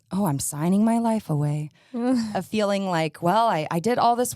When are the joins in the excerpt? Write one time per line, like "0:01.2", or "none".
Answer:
0:02.3